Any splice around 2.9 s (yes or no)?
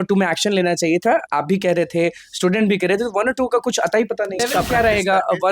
no